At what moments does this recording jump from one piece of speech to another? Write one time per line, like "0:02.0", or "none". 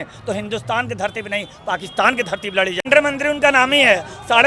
0:02.8